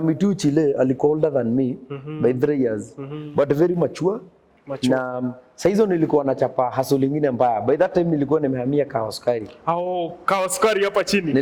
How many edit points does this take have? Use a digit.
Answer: 0